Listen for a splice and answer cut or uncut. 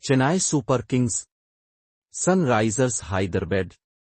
uncut